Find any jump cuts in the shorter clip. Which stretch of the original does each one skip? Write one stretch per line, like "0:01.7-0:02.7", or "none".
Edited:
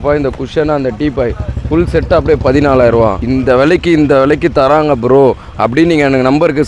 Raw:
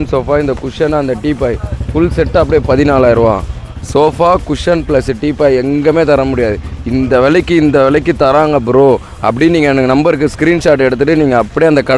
0:03.4-0:06.9